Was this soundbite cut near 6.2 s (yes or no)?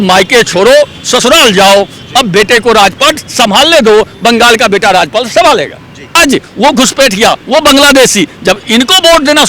yes